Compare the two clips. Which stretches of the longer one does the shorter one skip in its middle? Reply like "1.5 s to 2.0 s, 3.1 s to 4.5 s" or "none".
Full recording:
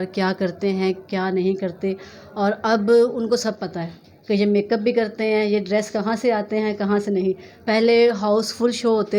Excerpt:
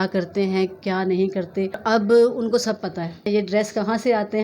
2.1 s to 2.6 s, 4.1 s to 5.5 s